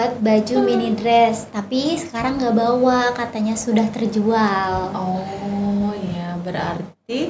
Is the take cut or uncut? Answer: uncut